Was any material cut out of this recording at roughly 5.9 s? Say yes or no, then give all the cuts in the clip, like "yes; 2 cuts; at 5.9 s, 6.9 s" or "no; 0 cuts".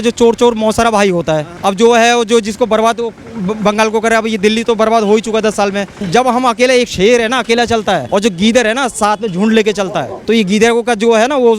yes; 4 cuts; at 1.5 s, 5.9 s, 8.0 s, 10.1 s